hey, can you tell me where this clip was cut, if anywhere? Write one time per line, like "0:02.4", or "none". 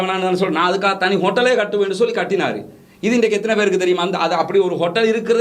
none